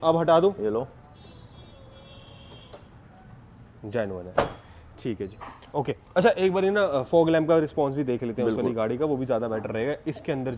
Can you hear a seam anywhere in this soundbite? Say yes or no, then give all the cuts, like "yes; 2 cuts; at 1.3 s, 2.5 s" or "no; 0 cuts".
no; 0 cuts